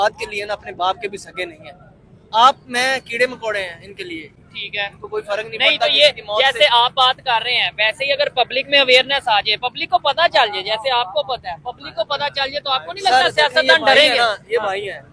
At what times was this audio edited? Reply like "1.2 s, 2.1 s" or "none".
none